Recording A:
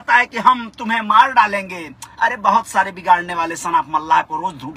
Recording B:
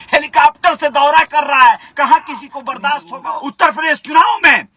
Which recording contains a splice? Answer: B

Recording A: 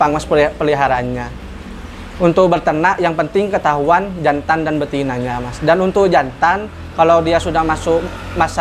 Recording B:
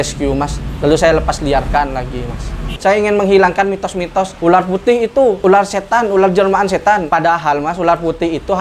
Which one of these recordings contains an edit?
B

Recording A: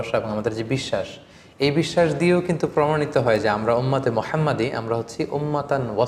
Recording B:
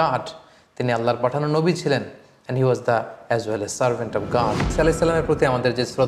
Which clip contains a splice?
B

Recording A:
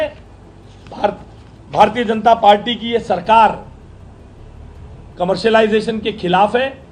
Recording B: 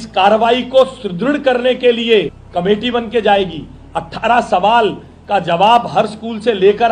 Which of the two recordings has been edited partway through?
B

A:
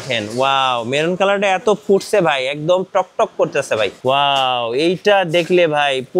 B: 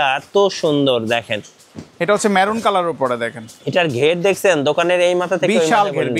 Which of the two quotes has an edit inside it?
A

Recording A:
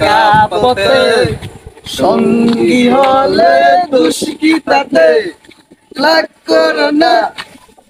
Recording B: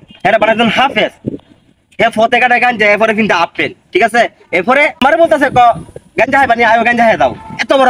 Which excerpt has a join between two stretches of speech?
B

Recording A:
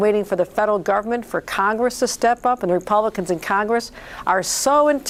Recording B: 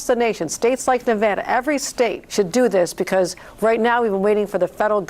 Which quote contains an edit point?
B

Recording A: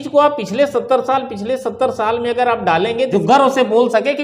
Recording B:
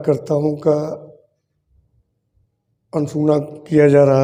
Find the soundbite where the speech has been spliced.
A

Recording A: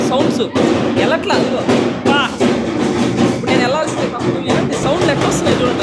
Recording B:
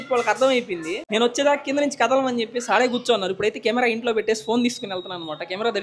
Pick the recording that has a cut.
B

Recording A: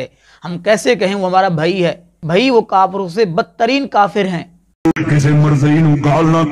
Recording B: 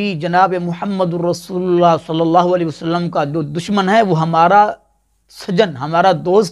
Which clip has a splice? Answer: A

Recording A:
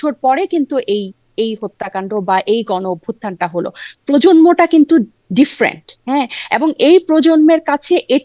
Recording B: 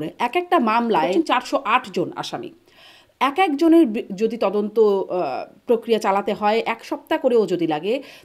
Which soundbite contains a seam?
B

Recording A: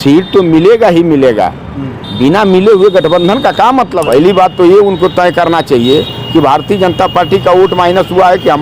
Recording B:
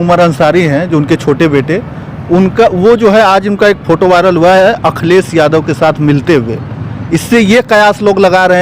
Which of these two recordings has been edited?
A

